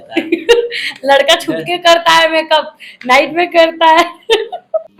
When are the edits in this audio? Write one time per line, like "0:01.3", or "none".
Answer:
none